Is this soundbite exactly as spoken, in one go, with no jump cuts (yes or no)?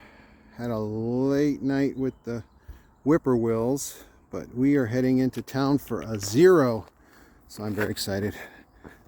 yes